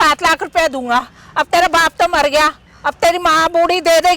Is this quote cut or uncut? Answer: uncut